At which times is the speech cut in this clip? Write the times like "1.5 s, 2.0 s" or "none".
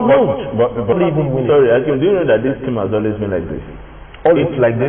0.9 s